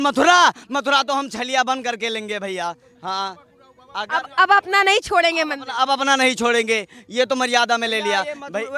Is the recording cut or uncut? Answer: uncut